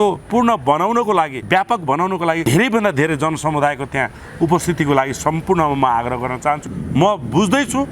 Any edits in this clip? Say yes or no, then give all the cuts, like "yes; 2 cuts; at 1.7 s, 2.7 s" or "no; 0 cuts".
yes; 3 cuts; at 1.4 s, 2.4 s, 6.6 s